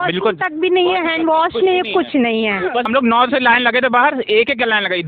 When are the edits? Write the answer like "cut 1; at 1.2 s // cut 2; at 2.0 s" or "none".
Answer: cut 1; at 2.9 s